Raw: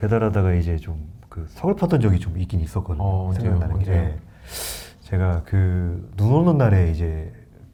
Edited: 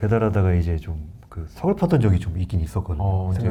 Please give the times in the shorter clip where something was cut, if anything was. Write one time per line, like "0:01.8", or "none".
none